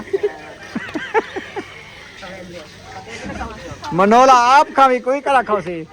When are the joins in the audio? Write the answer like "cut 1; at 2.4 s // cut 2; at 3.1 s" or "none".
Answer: cut 1; at 2.7 s